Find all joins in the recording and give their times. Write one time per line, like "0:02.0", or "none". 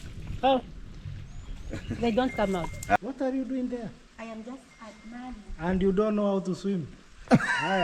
0:03.0